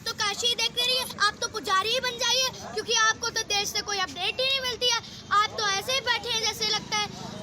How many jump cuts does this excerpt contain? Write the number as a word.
one